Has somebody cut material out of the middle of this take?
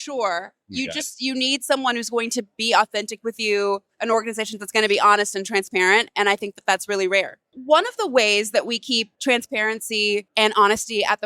yes; 3 cuts; at 7.5 s, 9.1 s, 10.3 s

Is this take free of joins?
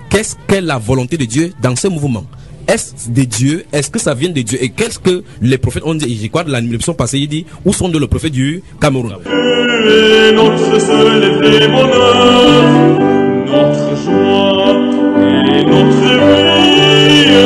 no; 1 cut; at 9.1 s

